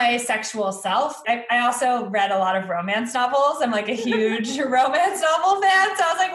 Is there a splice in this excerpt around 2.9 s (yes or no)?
no